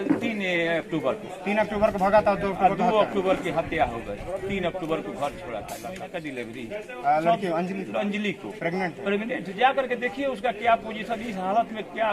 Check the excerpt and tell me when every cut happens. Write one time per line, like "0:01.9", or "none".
0:05.8